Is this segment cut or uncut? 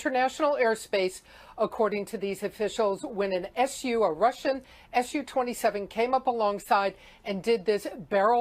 cut